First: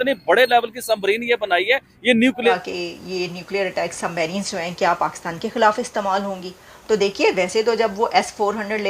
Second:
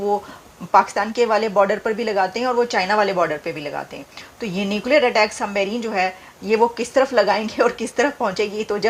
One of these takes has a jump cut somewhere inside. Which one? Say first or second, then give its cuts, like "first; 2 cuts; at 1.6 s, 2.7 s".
first; 1 cut; at 2.5 s